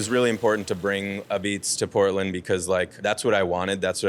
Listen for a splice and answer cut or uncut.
cut